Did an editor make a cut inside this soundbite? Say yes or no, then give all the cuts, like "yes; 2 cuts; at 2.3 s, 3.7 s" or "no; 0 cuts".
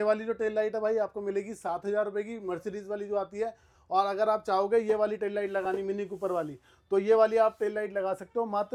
no; 0 cuts